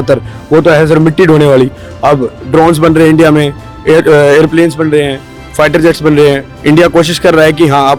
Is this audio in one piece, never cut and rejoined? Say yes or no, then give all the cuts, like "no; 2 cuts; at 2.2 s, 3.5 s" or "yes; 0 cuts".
yes; 0 cuts